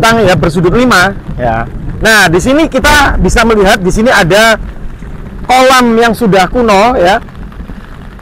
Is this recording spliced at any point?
no; 0 cuts

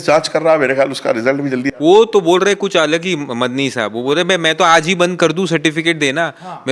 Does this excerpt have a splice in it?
no; 0 cuts

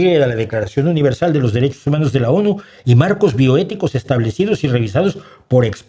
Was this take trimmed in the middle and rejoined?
no; 0 cuts

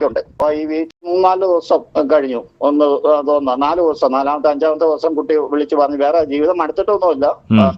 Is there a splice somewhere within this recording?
yes; 1 cut; at 0.9 s

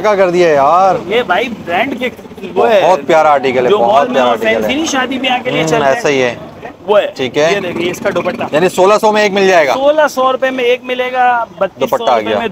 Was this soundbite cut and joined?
no; 0 cuts

